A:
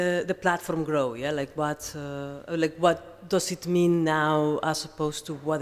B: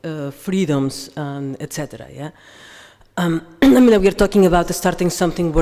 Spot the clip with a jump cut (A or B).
A